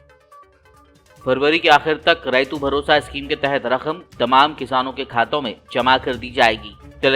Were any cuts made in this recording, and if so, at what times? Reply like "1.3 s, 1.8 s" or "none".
none